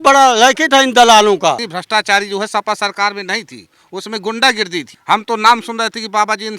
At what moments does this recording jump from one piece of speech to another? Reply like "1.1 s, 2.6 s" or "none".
1.7 s, 4.9 s